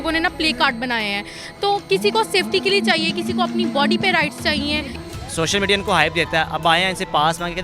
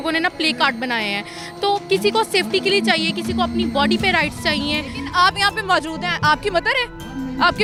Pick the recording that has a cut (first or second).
first